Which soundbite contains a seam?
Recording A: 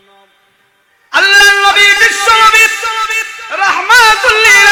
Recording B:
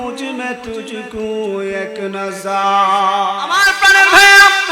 B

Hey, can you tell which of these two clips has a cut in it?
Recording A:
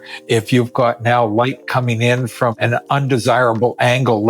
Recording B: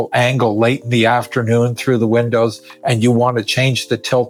A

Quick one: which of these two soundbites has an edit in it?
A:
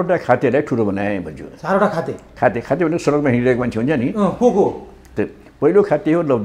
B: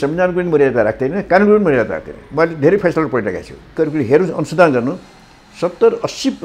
B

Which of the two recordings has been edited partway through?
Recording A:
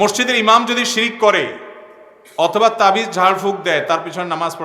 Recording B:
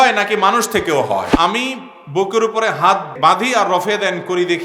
B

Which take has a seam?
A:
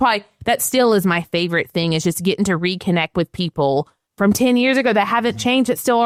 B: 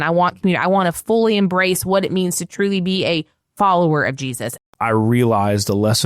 B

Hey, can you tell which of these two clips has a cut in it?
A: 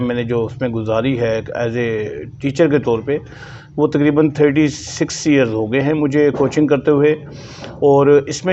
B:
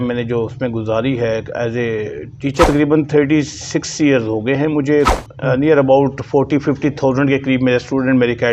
B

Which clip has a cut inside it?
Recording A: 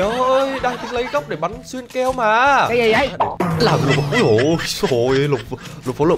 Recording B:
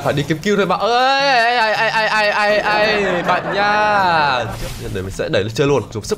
B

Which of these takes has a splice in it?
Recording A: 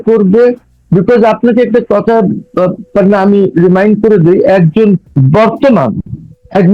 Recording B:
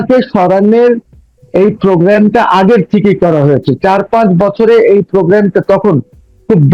A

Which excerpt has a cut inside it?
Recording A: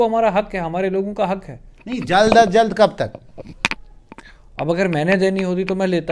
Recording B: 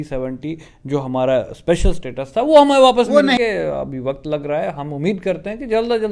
B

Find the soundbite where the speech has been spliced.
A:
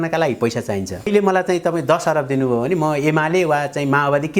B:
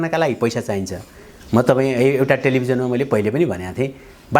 A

